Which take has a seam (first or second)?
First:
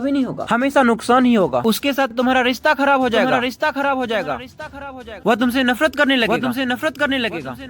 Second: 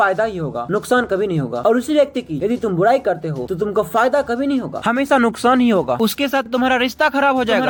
first